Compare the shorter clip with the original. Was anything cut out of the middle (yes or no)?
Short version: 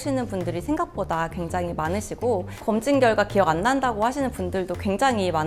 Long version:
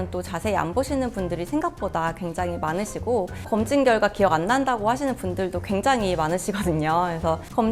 no